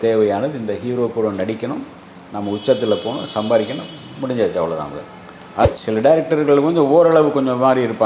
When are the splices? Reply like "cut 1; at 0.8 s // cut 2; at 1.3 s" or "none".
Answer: cut 1; at 5.6 s